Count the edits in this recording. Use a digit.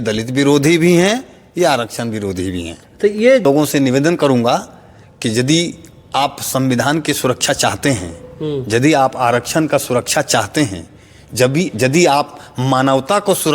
1